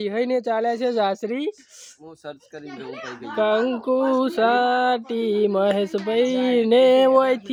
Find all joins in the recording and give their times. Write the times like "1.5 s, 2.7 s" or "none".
none